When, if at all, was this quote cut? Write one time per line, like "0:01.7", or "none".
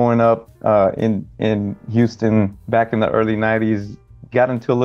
0:02.6

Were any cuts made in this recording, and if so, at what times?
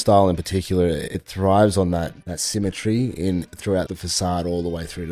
0:01.2
0:02.2
0:03.9

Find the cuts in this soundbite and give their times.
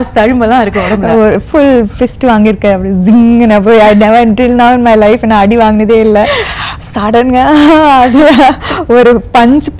none

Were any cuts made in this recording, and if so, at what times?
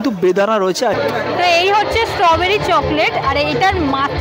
0:01.0

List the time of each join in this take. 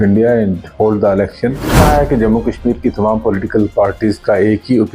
0:01.8

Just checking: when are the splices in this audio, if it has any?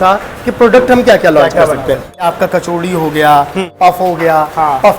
0:02.1
0:03.7

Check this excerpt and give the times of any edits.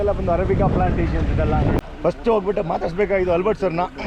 0:01.8

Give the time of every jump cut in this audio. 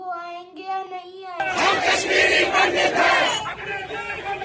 0:01.4

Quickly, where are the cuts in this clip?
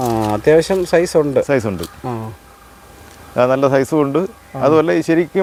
none

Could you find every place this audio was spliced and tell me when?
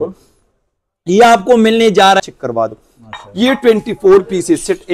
0:02.2

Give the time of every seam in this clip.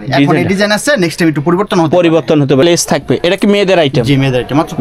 0:02.6

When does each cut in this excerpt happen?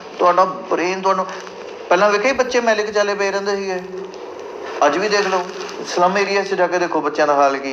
none

